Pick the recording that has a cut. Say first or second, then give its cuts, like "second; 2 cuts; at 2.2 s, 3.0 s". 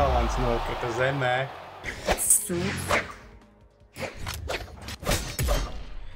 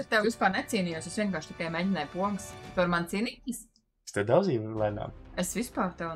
first; 1 cut; at 1.9 s